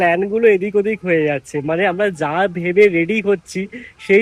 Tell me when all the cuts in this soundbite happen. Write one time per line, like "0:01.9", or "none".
none